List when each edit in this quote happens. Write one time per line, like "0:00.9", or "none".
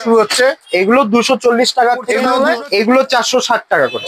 0:02.3